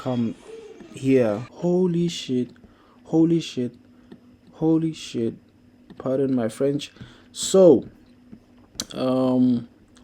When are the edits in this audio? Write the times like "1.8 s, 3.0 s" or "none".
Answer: 1.5 s

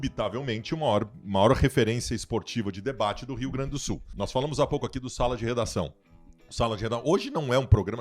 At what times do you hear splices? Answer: 4.1 s

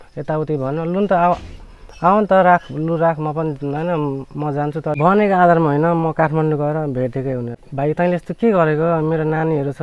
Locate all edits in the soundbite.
5.0 s, 7.6 s

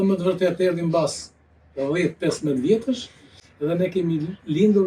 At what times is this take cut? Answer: none

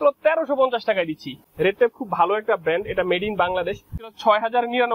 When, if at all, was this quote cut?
1.4 s, 4.0 s

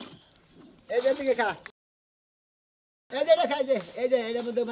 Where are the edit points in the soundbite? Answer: none

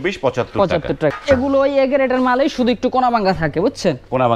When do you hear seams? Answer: 1.1 s

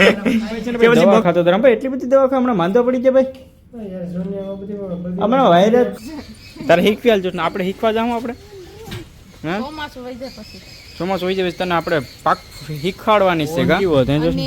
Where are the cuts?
1.1 s, 6.0 s, 13.8 s

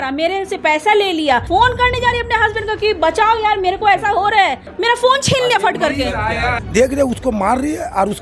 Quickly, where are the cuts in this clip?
1.5 s, 4.7 s, 6.3 s

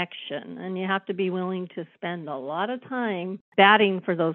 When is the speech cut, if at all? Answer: 3.4 s

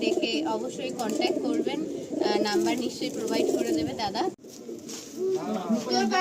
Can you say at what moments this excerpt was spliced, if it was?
4.4 s

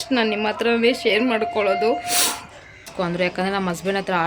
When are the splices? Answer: 2.9 s

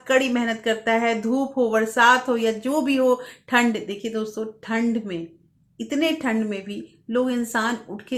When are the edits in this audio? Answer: none

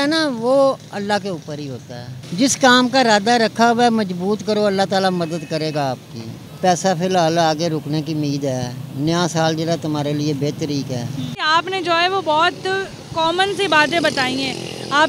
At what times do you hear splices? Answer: 2.1 s, 6.4 s, 11.5 s

